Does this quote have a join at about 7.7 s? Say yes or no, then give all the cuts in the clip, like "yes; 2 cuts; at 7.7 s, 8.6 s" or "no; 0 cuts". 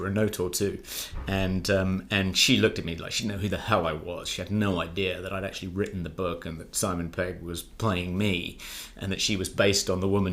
no; 0 cuts